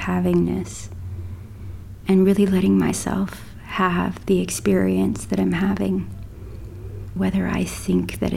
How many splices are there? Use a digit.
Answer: 1